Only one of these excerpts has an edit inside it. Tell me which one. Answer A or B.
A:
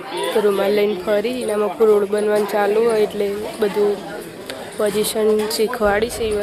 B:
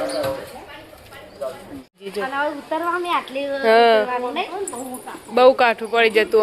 B